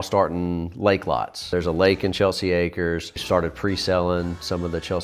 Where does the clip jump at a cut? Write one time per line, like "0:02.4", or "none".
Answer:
0:01.5
0:03.2